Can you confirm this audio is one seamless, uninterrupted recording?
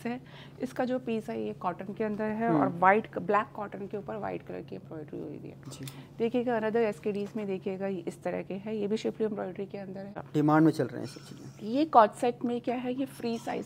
no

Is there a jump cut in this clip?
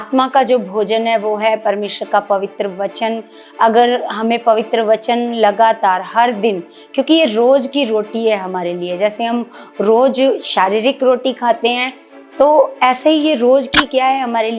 no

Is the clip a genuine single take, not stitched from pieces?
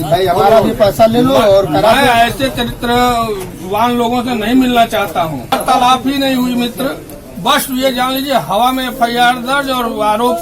no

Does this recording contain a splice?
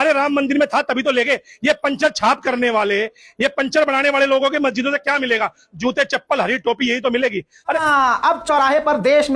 yes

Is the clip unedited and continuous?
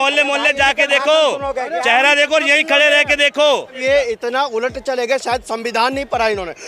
no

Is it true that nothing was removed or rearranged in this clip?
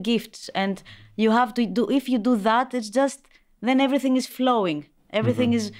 yes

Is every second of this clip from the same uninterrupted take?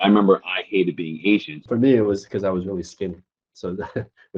no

